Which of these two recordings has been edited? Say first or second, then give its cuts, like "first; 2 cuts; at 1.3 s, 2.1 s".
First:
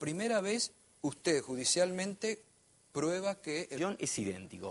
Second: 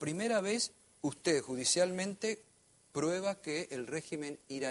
second; 1 cut; at 3.7 s